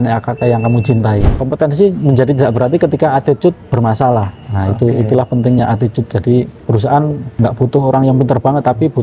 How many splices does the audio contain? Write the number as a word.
four